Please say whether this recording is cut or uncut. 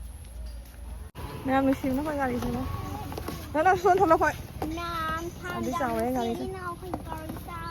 uncut